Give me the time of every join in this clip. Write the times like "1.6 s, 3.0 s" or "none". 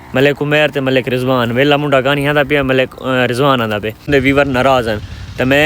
4.1 s